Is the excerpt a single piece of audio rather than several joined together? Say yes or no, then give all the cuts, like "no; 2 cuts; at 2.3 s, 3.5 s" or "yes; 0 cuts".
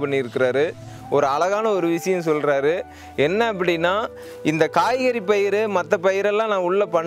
no; 1 cut; at 0.9 s